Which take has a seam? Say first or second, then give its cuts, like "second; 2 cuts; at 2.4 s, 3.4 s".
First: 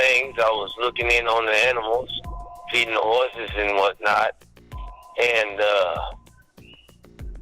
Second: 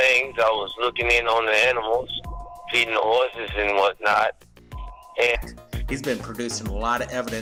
first; 1 cut; at 5.4 s